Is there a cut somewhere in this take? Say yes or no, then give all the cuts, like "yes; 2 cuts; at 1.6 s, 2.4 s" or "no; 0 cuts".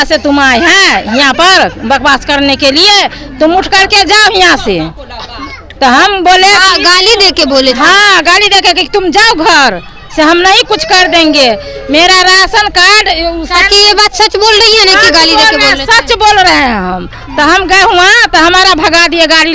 no; 0 cuts